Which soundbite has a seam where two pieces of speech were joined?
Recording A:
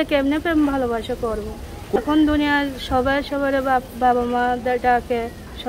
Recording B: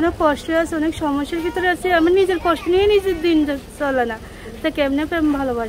A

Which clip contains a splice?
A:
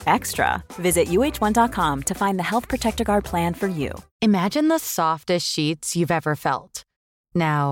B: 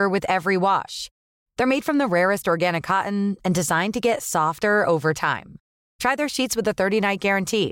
A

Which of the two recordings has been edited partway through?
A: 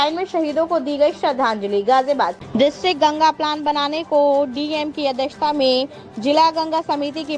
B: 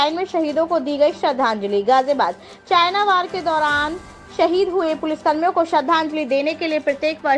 A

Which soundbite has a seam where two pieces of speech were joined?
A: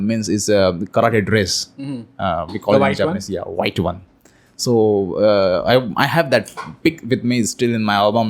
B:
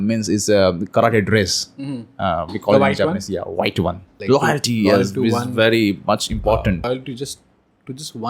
B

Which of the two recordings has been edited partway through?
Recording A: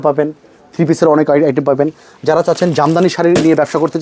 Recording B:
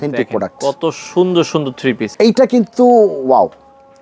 B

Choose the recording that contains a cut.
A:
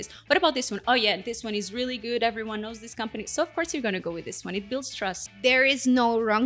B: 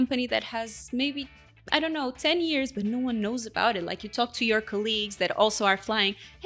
A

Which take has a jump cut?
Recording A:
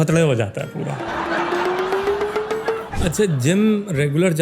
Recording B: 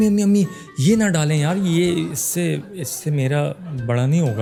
A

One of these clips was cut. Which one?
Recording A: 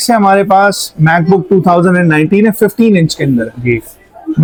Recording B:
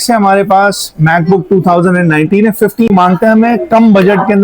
B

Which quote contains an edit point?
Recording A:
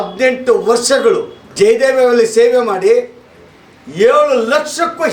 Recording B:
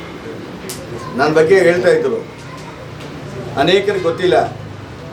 A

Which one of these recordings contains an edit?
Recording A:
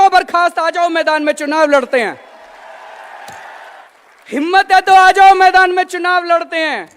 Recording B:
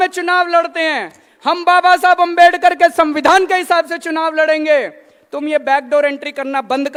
A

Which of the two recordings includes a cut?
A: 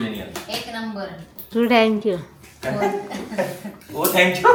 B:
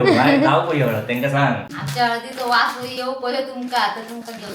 B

